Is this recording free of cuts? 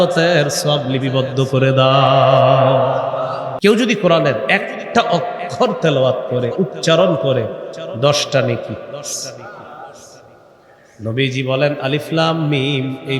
no; 1 cut; at 3.5 s

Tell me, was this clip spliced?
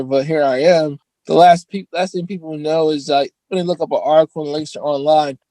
yes; 1 cut; at 1.1 s

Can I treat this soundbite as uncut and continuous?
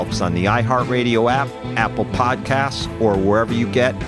yes; 0 cuts

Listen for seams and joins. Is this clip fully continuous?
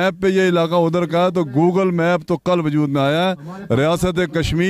yes; 0 cuts

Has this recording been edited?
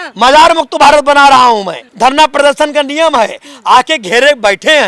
yes; 1 cut; at 1.8 s

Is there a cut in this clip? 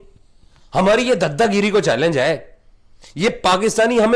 no; 0 cuts

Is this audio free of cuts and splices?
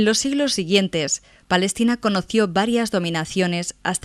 no; 1 cut; at 2.9 s

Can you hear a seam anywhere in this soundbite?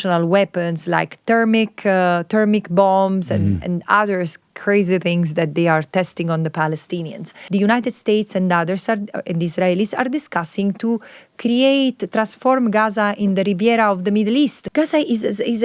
yes; 2 cuts; at 7.3 s, 14.6 s

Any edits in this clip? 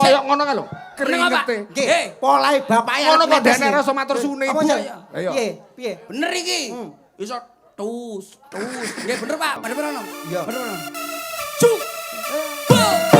yes; 1 cut; at 9.6 s

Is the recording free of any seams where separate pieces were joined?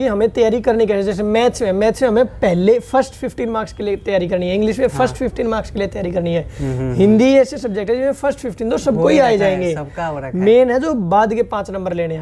yes; 0 cuts

